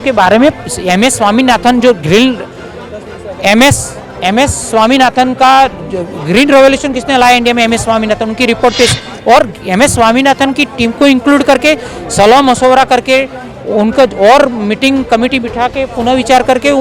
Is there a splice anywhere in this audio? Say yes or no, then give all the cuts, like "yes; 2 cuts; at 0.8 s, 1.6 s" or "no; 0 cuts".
no; 0 cuts